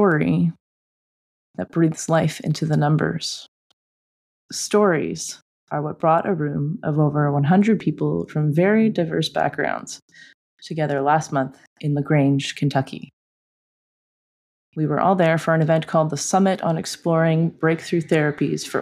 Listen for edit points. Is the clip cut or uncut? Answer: cut